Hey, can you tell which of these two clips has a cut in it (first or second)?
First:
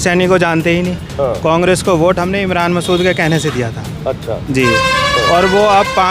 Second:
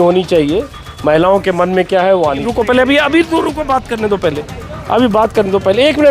second